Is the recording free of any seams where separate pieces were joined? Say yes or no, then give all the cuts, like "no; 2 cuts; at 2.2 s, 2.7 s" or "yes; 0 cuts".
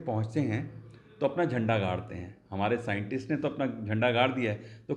yes; 0 cuts